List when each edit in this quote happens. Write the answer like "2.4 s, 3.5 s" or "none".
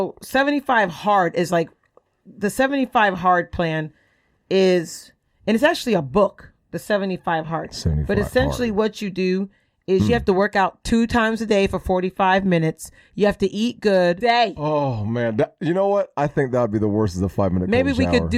14.2 s